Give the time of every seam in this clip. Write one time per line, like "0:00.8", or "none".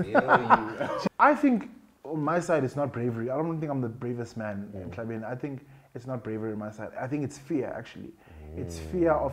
0:01.0